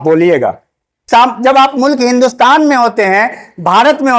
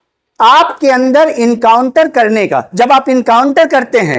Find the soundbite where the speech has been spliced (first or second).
first